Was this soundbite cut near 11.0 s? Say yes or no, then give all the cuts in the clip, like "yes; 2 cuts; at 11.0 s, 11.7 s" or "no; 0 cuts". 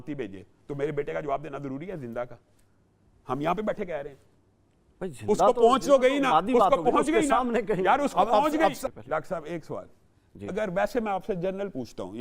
no; 1 cut; at 8.8 s